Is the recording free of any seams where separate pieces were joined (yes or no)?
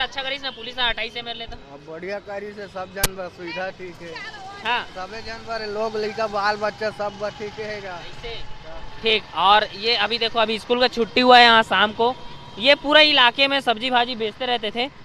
yes